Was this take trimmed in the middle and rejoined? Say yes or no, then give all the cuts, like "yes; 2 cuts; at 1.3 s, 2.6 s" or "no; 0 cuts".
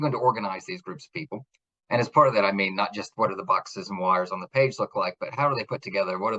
no; 0 cuts